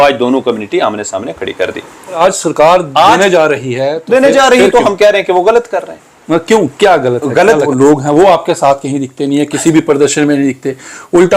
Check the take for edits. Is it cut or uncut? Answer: cut